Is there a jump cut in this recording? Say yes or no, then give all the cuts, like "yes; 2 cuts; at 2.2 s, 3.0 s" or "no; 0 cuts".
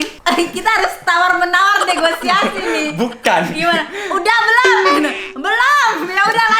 no; 0 cuts